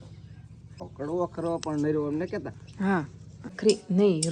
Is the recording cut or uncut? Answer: cut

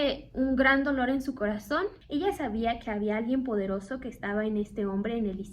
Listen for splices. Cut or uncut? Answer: cut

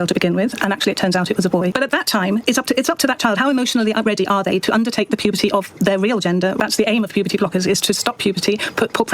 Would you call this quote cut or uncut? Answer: cut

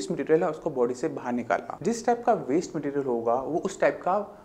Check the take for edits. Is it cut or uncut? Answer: cut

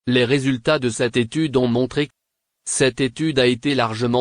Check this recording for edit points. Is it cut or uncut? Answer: cut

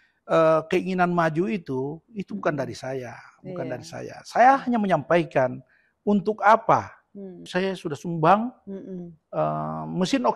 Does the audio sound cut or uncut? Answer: cut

